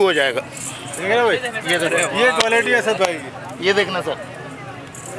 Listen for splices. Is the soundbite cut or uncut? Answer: uncut